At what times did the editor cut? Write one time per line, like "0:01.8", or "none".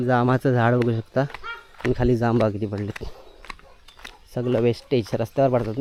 none